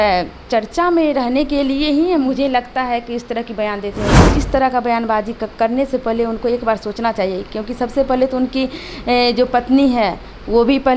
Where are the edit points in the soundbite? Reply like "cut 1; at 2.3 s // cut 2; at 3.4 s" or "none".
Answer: cut 1; at 4.2 s